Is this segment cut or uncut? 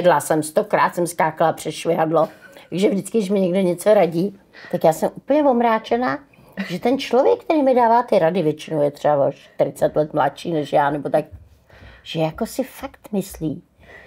uncut